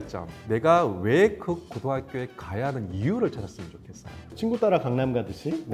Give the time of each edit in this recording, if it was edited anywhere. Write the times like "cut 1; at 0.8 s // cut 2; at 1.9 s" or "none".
cut 1; at 4.2 s